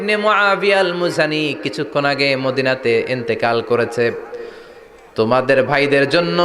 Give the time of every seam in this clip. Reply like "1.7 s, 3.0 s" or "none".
none

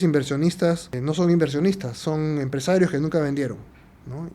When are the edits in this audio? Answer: 0.9 s

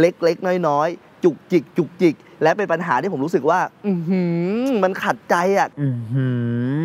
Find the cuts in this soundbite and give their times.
2.3 s

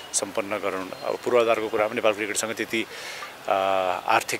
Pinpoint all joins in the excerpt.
none

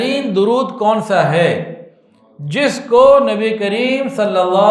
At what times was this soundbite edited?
none

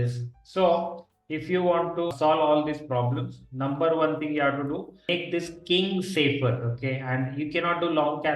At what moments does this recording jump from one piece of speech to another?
2.1 s, 5.1 s

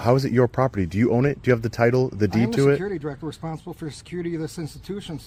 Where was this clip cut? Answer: none

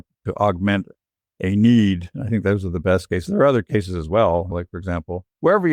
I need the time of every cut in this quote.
4.5 s

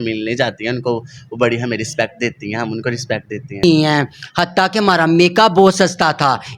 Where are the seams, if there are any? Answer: 3.6 s

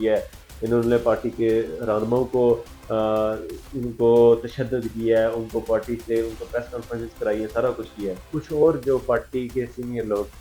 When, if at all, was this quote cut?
8.2 s

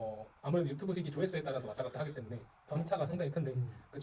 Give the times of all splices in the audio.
1.0 s

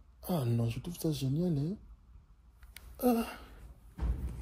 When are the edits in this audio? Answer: none

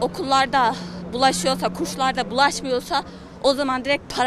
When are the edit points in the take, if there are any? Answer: none

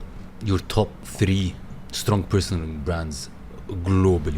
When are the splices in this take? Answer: 1.0 s

